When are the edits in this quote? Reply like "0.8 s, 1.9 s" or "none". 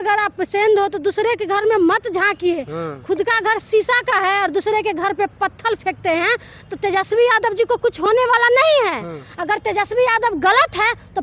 none